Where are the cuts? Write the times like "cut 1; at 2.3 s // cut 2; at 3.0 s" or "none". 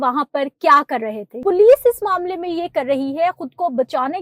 cut 1; at 1.2 s

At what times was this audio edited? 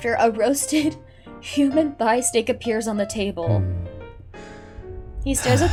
none

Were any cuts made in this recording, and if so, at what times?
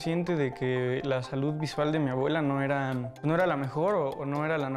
cut 1; at 3.1 s

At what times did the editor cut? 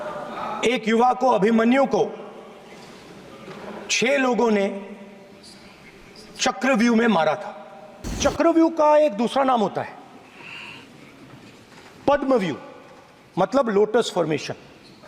cut 1; at 8.2 s

